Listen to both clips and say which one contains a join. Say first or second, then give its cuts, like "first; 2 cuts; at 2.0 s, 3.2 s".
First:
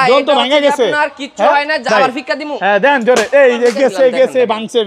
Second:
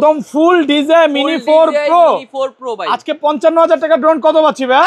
first; 1 cut; at 1.9 s